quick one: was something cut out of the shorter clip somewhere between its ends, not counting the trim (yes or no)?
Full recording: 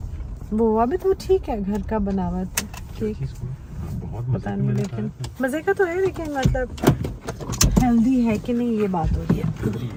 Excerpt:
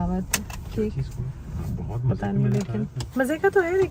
no